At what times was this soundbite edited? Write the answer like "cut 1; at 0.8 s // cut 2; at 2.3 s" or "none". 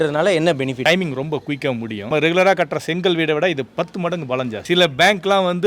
cut 1; at 0.8 s // cut 2; at 2.1 s // cut 3; at 4.6 s